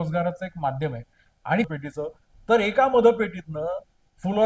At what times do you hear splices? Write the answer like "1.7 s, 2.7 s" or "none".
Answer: 1.7 s